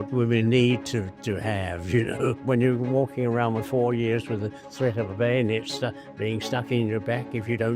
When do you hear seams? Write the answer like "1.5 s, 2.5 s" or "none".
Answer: 2.4 s